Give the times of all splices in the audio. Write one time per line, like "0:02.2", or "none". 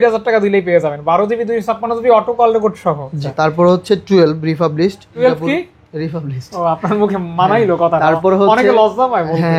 0:03.1
0:05.1

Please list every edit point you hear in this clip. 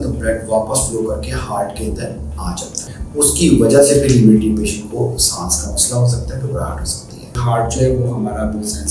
0:03.0
0:07.4

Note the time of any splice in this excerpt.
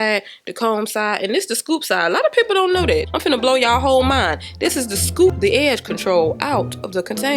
0:03.1

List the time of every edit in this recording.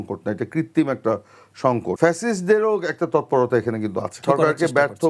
0:01.9
0:04.2

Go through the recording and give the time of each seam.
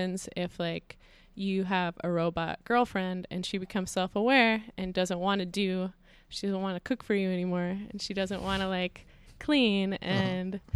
none

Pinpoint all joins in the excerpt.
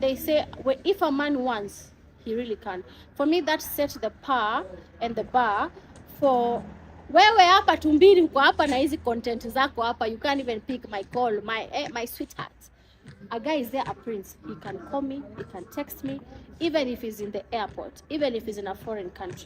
none

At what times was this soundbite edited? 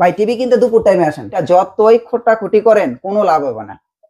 0:01.4

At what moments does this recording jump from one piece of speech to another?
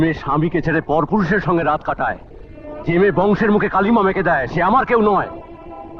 none

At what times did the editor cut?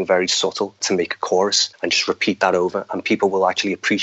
0:00.8
0:01.7

